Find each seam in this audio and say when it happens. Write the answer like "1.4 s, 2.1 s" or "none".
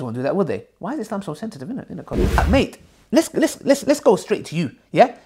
2.4 s